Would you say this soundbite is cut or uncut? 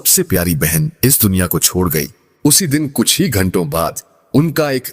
uncut